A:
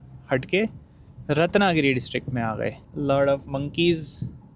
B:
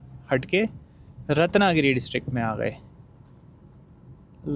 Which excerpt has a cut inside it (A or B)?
A